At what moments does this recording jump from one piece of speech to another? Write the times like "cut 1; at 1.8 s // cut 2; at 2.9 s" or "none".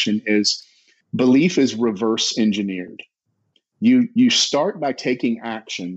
none

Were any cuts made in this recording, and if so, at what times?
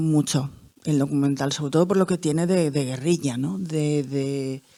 none

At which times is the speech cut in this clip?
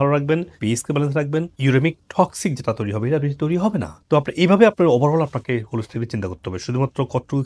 cut 1; at 4.0 s

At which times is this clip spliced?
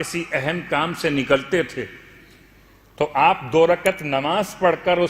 none

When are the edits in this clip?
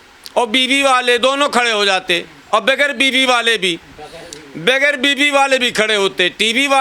none

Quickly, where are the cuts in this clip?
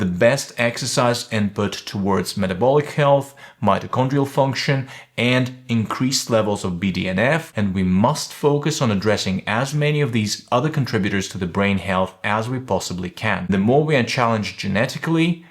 cut 1; at 7.5 s // cut 2; at 13.5 s

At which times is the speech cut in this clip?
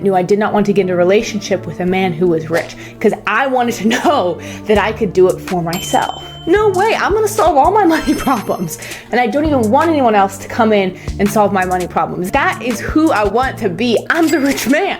cut 1; at 6.3 s // cut 2; at 9.0 s // cut 3; at 12.2 s // cut 4; at 14.1 s

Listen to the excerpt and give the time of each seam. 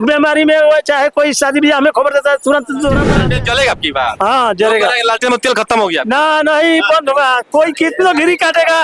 cut 1; at 3.1 s

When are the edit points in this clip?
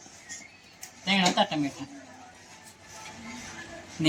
none

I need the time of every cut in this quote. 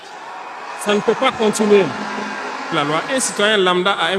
cut 1; at 2.7 s

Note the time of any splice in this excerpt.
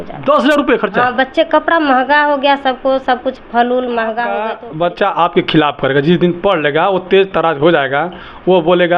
cut 1; at 4.5 s

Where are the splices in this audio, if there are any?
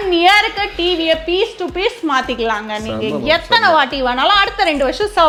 none

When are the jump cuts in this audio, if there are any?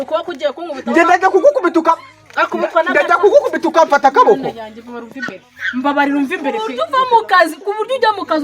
cut 1; at 6.8 s

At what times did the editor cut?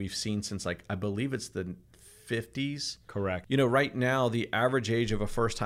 cut 1; at 3.4 s

